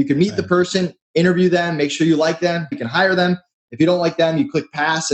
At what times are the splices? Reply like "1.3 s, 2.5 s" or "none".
2.7 s